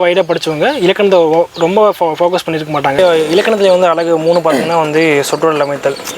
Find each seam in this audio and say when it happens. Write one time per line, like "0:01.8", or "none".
0:02.9